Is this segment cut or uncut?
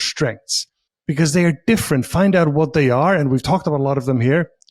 uncut